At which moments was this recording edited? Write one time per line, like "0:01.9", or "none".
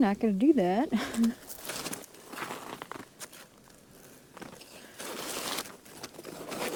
none